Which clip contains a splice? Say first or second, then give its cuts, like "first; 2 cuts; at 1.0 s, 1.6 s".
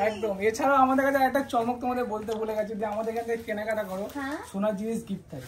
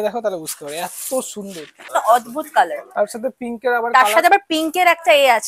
second; 1 cut; at 1.9 s